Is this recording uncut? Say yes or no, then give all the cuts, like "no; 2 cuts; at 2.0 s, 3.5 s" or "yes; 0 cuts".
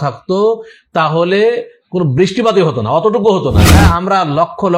no; 1 cut; at 3.7 s